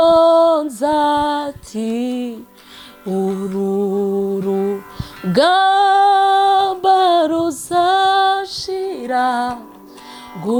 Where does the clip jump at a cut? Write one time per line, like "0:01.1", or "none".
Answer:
none

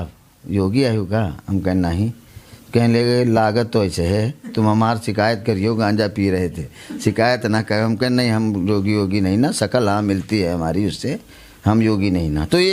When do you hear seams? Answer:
none

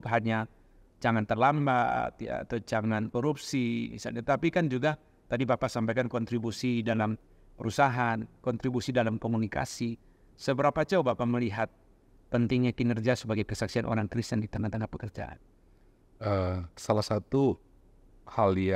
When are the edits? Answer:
none

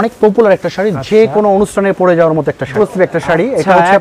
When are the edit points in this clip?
0:02.7

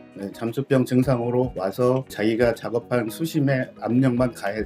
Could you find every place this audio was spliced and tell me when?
0:02.1

